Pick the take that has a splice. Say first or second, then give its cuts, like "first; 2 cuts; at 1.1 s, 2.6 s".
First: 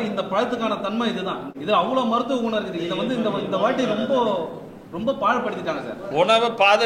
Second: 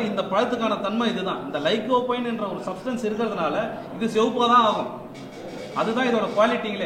first; 2 cuts; at 1.4 s, 6.0 s